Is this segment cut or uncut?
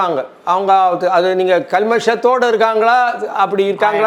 uncut